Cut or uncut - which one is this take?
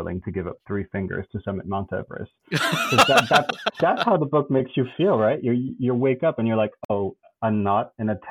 uncut